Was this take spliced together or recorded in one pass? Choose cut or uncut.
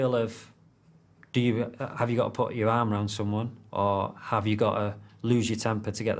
uncut